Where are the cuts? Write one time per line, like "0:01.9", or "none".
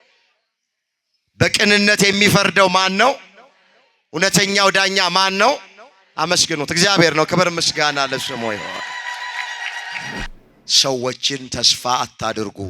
0:10.3